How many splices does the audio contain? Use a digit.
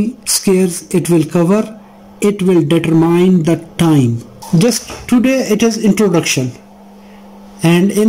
1